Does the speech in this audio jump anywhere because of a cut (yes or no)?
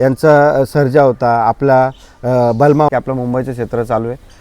yes